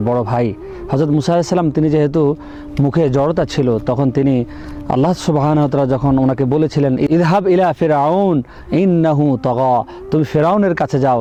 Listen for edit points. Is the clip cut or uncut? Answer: uncut